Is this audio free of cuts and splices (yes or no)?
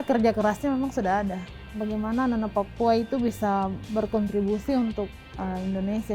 no